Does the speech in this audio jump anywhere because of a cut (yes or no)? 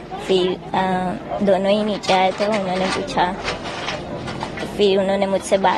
no